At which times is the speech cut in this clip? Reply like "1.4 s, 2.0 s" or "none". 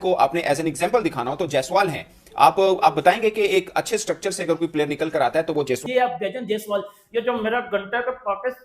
5.8 s